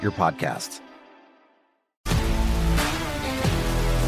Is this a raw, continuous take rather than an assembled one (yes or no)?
yes